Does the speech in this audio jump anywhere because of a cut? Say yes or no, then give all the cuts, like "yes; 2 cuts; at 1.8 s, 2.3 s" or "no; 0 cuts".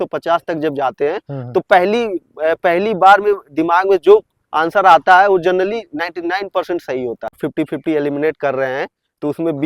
yes; 1 cut; at 7.4 s